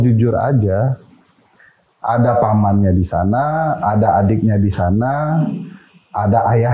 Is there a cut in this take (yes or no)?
no